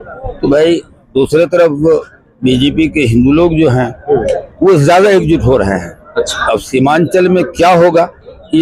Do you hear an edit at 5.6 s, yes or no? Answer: no